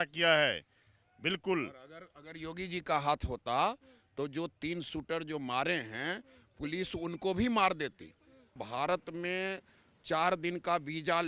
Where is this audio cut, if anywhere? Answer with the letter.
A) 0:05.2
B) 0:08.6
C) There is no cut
B